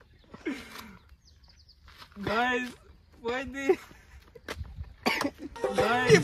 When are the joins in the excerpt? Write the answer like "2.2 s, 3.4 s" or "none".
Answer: none